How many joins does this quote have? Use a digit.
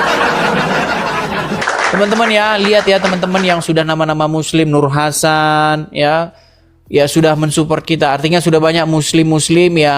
1